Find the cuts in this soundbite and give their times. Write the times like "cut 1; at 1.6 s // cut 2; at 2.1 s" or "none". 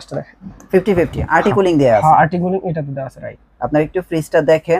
none